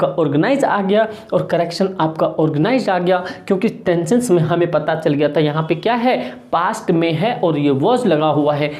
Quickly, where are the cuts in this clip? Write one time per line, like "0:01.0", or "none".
none